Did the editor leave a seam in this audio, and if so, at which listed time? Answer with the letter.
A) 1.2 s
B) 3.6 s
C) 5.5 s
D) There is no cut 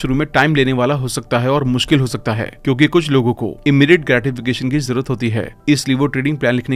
D